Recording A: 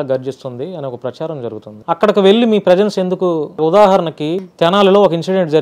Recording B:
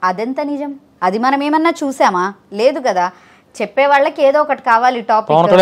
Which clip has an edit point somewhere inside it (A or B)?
A